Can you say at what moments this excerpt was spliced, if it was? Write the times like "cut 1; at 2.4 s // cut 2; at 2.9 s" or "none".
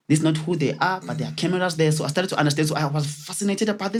none